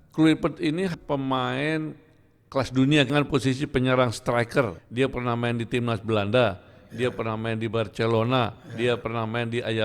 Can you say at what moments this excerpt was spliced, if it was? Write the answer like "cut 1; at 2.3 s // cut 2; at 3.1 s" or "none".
cut 1; at 0.9 s // cut 2; at 3.1 s // cut 3; at 4.8 s